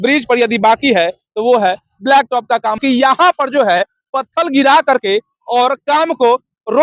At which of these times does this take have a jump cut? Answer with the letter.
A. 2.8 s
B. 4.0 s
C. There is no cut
A